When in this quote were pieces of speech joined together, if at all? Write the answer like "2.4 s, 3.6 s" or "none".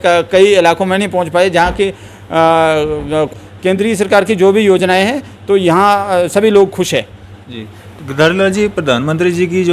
3.3 s